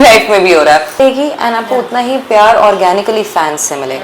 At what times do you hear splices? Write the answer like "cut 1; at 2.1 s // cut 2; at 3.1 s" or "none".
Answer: cut 1; at 1.0 s